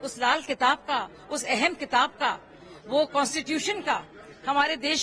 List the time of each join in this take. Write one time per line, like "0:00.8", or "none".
none

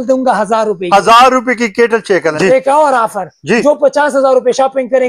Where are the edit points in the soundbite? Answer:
0:02.3

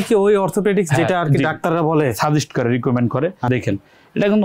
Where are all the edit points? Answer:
0:03.5

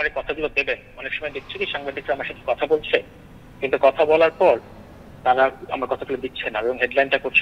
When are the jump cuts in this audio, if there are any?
none

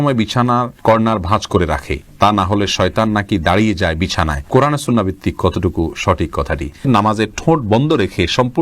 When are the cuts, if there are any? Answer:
0:06.8

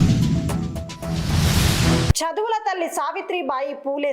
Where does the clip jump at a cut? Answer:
0:02.1

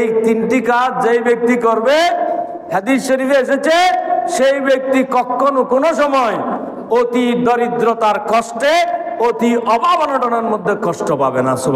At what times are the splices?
none

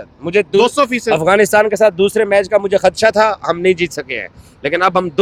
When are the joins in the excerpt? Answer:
none

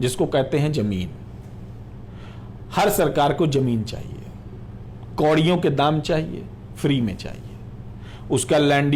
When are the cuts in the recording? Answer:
none

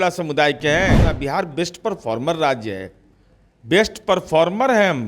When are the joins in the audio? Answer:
0:01.1

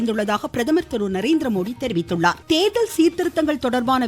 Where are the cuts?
0:02.4

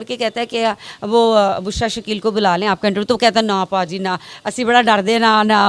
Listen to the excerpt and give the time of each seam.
none

